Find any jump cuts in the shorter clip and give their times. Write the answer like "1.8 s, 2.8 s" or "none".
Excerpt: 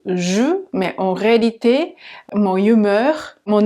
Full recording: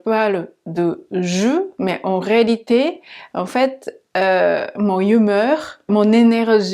2.2 s